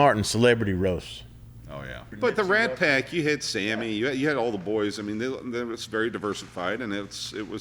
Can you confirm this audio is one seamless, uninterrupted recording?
no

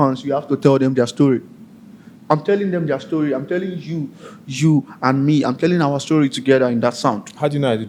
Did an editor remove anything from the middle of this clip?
no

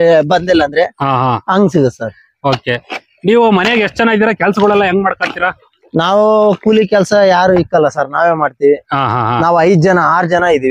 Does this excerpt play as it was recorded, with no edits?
yes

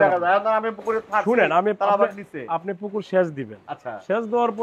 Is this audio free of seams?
yes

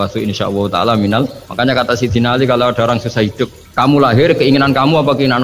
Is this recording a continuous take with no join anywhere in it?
no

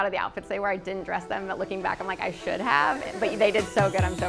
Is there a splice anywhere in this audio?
no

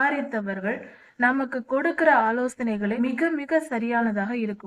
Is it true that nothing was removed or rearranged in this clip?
no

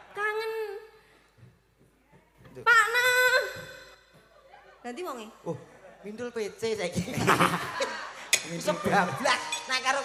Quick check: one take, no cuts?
yes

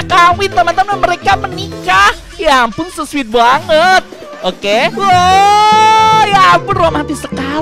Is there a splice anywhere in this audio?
no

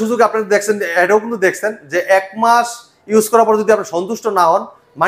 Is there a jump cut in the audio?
no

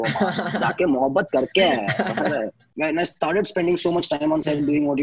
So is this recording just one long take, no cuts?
no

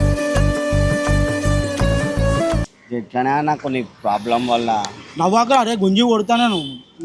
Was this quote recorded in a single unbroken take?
no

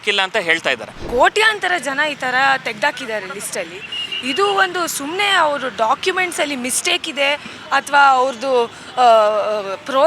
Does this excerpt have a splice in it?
yes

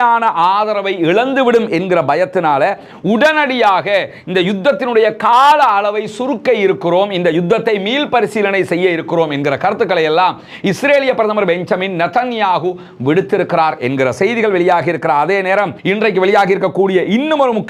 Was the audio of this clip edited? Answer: yes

